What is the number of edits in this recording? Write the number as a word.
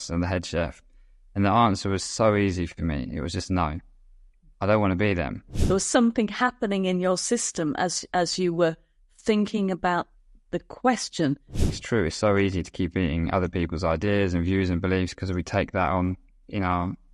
two